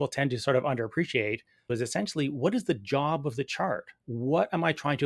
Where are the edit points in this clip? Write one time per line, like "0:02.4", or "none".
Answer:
0:01.7
0:04.0